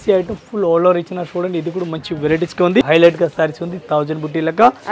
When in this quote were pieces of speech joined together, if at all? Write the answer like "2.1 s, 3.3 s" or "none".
2.8 s